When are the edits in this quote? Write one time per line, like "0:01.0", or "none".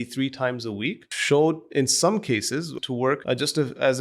0:01.1
0:02.8